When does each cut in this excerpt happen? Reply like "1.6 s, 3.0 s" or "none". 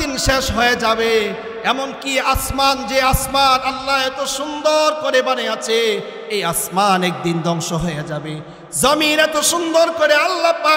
none